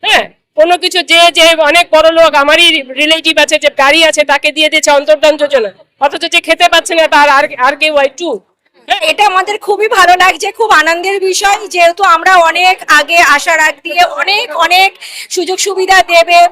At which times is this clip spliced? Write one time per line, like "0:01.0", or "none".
0:09.0